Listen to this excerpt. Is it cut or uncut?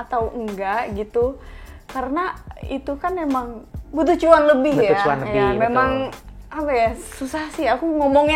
uncut